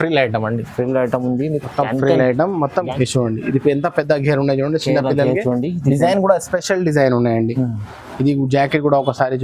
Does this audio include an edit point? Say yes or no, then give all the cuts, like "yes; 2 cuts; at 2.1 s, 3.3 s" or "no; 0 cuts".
yes; 1 cut; at 2.9 s